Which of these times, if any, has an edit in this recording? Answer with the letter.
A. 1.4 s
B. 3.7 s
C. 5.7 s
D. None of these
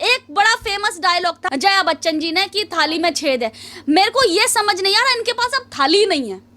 A